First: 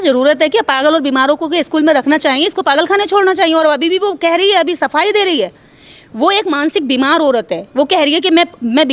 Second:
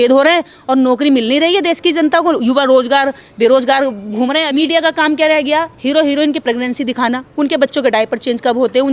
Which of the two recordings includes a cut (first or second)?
second